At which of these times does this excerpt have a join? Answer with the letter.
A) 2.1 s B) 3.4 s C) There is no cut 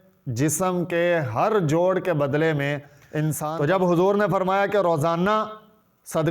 B